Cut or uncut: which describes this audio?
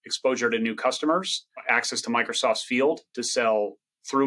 cut